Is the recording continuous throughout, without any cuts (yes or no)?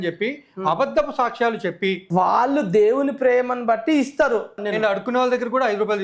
no